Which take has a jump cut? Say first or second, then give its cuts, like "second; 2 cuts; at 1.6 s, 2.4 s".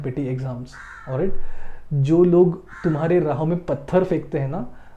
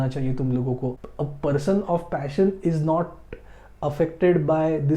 second; 1 cut; at 1.0 s